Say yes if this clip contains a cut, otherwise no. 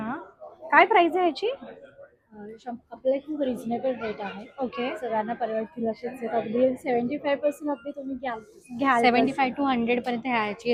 no